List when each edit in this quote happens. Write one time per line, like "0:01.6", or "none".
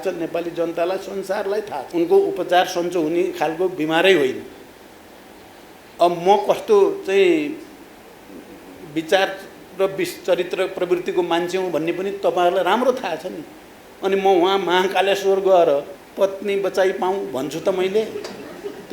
0:01.9
0:16.0